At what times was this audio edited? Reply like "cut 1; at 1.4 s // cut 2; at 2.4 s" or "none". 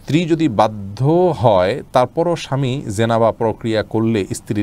none